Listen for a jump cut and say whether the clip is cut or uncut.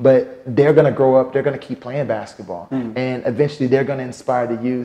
uncut